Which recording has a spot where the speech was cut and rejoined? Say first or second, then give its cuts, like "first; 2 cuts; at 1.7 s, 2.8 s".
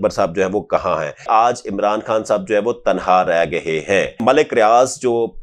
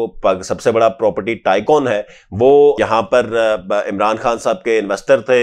first; 2 cuts; at 1.3 s, 4.2 s